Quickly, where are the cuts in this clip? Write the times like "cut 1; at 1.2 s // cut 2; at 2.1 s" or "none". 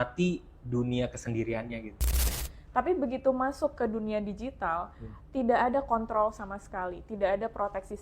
cut 1; at 2.2 s